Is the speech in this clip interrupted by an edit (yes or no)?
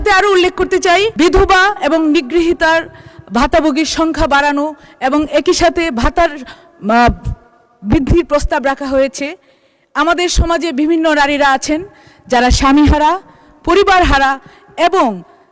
yes